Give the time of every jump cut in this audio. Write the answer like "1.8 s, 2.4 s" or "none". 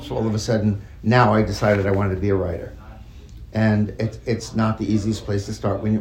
none